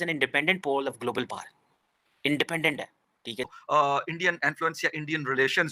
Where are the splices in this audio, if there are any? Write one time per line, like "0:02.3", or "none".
0:03.6